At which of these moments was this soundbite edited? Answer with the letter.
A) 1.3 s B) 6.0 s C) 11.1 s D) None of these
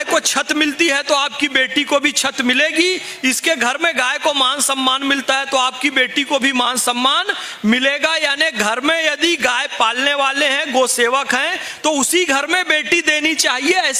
D